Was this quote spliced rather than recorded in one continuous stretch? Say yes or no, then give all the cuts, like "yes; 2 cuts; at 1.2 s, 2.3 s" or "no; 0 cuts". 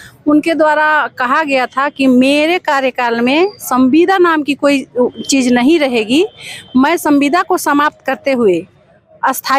no; 0 cuts